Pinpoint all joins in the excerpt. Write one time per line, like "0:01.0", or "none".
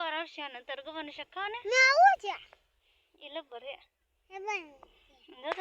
none